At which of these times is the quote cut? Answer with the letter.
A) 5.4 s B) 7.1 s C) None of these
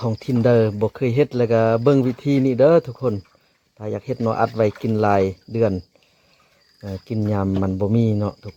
C